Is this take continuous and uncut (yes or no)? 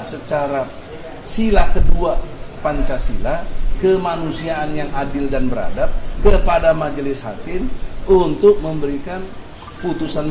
yes